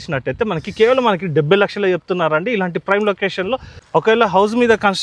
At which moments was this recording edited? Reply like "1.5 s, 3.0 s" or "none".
3.7 s